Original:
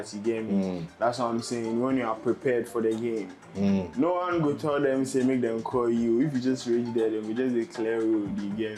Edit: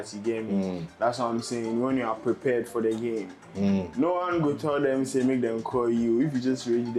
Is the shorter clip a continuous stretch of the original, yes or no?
yes